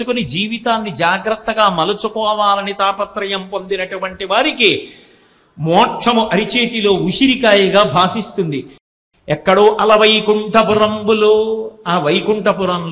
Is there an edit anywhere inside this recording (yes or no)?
yes